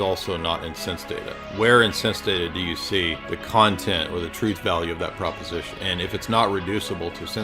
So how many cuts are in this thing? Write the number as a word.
two